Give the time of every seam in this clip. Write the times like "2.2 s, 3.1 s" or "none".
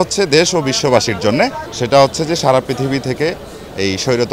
1.7 s